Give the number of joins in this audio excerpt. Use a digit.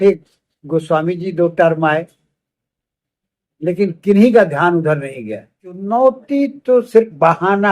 1